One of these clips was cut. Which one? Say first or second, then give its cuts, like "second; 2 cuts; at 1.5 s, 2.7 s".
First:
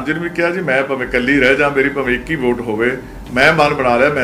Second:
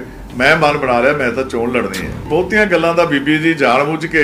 second; 1 cut; at 2.2 s